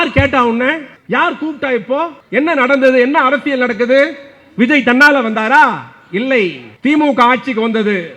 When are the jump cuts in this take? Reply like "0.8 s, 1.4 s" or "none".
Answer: 0.9 s, 2.2 s, 6.6 s